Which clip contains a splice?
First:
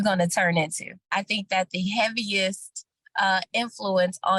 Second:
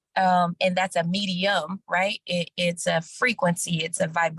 first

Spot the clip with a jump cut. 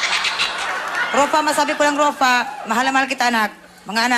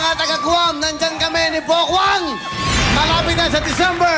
first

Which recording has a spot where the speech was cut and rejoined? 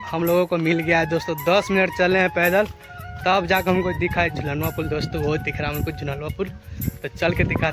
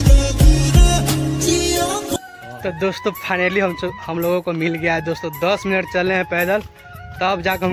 second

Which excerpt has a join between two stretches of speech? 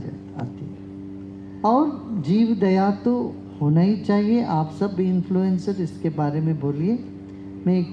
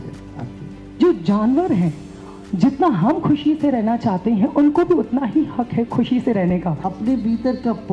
second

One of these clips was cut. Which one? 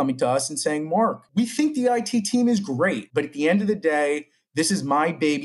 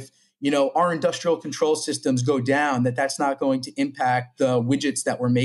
first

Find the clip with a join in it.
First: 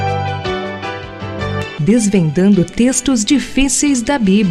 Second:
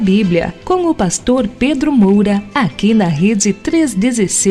second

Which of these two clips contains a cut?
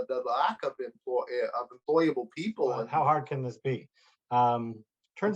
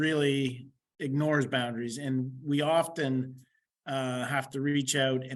first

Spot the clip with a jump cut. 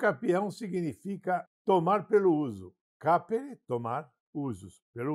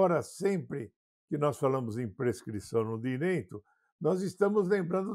first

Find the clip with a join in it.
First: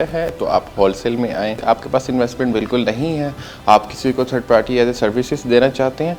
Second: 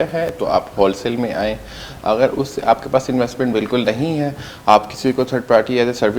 first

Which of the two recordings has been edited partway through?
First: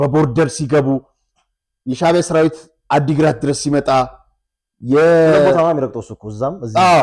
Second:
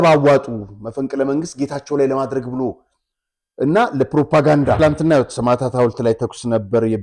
second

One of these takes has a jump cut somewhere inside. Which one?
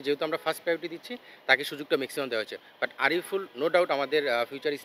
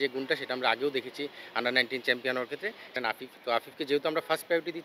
second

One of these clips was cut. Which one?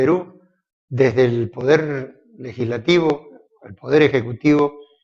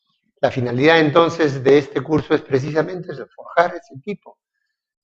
second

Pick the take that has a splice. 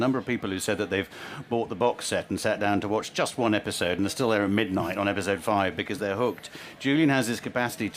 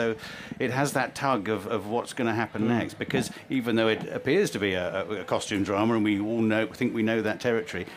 first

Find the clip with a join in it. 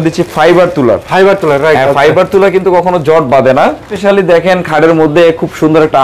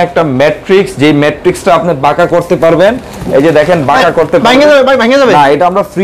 first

